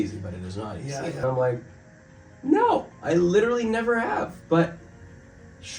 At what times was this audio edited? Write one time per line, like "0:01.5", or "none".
0:01.2